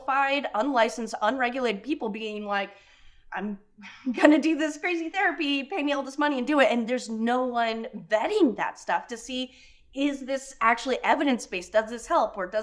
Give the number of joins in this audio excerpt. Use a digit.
0